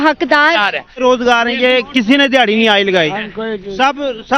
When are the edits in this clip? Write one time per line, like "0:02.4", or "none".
0:01.0